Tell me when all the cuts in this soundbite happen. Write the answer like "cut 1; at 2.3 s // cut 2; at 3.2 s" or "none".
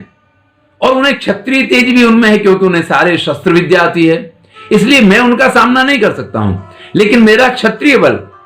none